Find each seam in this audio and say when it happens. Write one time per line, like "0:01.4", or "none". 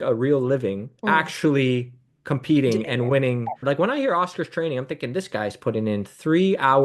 0:00.9
0:03.6

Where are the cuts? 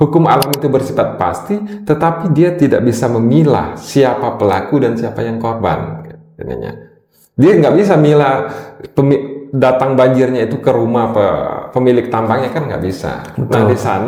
none

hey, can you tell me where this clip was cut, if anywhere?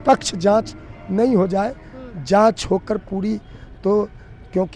none

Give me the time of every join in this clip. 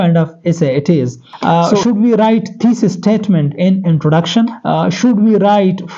0:01.2
0:04.6

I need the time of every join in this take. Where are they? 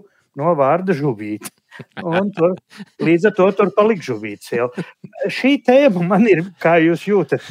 none

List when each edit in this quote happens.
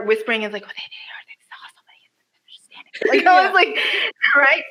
none

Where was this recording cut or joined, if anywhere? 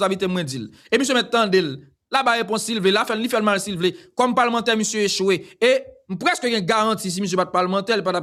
none

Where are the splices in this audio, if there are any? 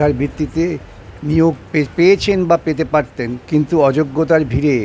0:03.4

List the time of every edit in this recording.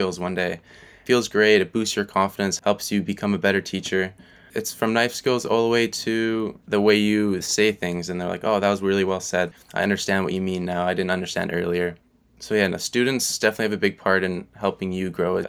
0:09.5
0:13.4

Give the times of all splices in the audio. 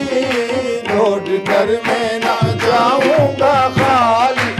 none

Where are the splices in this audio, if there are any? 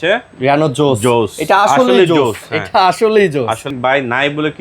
0:03.7

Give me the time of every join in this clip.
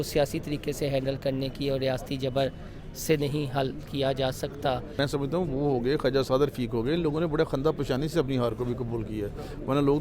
0:04.9

